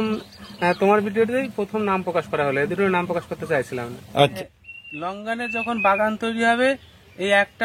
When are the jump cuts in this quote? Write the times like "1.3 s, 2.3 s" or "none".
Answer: 4.4 s